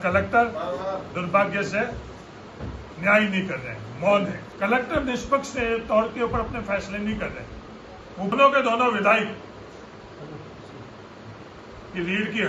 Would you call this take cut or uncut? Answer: cut